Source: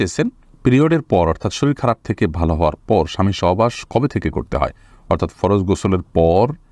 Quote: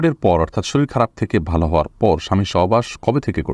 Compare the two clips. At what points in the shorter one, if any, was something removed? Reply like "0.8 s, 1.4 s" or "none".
none